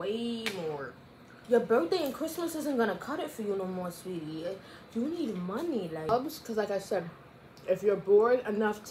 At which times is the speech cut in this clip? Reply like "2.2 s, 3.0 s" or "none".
1.3 s, 6.1 s